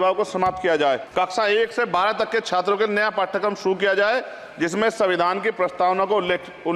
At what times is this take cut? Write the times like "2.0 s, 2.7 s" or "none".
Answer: 1.1 s